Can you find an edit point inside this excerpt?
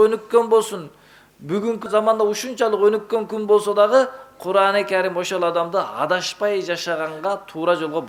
no; 0 cuts

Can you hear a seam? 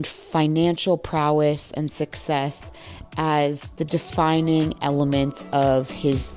no; 0 cuts

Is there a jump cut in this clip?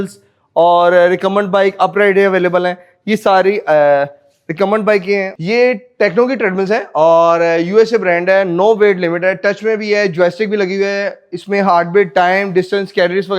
no; 0 cuts

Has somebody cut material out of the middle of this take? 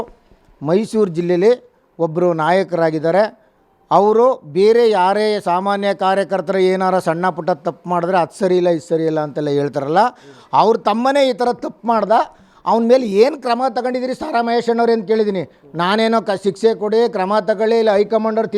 no; 0 cuts

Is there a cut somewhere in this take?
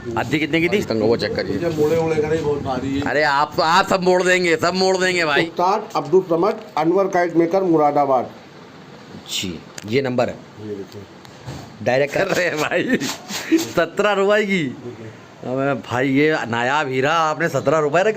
yes; 3 cuts; at 0.8 s, 5.4 s, 12.1 s

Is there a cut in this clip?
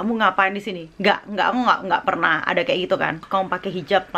yes; 1 cut; at 3.2 s

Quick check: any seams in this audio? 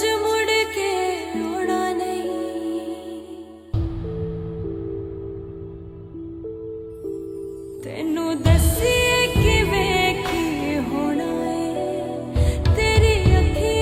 no; 0 cuts

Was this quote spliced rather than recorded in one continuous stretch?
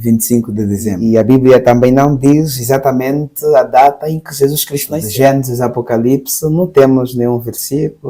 yes; 2 cuts; at 1.0 s, 5.0 s

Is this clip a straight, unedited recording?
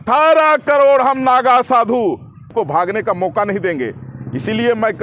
no; 1 cut; at 2.5 s

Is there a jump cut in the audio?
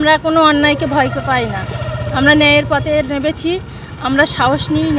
no; 0 cuts

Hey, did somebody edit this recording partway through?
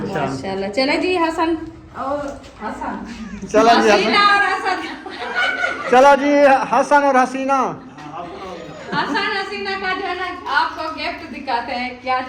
yes; 1 cut; at 8.5 s

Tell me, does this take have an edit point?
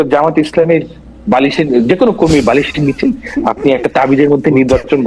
no; 0 cuts

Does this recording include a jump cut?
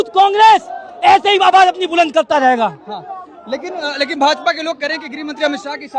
no; 0 cuts

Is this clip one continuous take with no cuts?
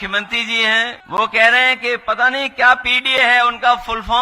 no; 1 cut; at 1.0 s

